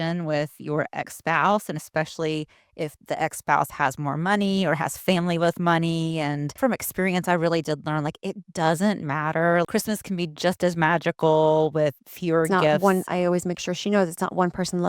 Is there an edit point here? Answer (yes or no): yes